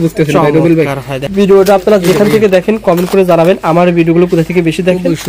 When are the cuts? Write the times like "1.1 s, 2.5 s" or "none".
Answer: 1.1 s